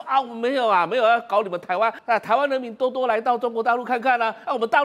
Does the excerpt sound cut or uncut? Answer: cut